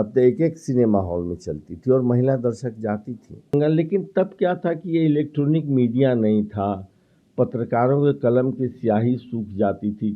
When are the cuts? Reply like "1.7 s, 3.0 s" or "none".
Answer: 3.5 s